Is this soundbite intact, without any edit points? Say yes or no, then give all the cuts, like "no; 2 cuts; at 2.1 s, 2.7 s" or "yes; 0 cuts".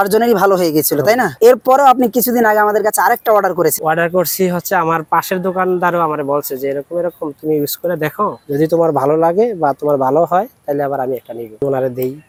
yes; 0 cuts